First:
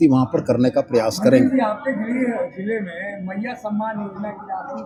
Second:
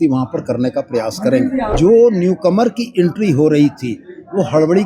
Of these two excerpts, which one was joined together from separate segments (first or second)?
second